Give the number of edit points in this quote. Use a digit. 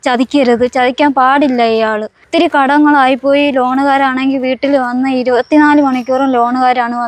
1